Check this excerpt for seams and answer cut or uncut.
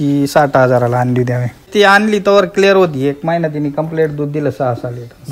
cut